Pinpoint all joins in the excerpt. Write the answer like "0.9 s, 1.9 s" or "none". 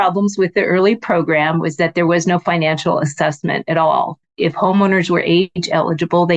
4.2 s

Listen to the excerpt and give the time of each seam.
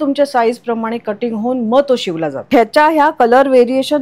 2.4 s

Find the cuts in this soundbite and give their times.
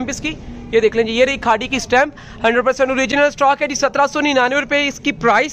none

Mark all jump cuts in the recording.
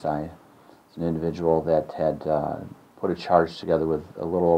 none

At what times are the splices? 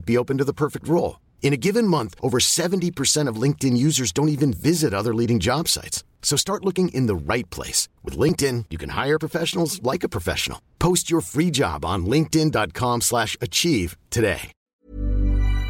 14.6 s

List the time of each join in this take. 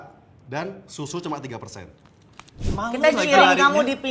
2.7 s

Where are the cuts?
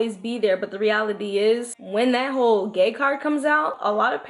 1.8 s

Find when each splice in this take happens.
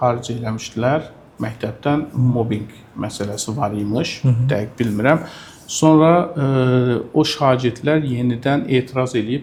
none

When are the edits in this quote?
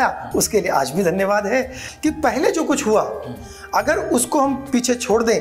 1.8 s

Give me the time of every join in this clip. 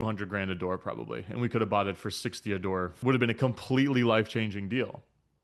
2.9 s

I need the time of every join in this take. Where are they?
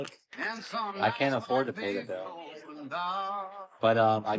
none

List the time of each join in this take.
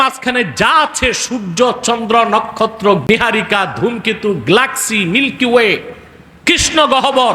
3.1 s

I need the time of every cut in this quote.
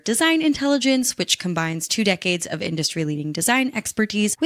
none

